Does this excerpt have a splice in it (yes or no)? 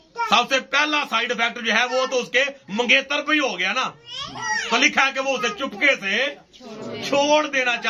no